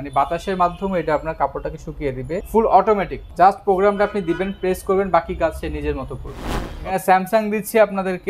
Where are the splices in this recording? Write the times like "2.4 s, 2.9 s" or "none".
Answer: 2.4 s, 3.2 s, 6.8 s